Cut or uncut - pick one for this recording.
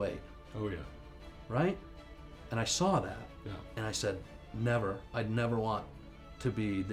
uncut